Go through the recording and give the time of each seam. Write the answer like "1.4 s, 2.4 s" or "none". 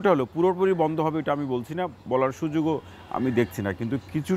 none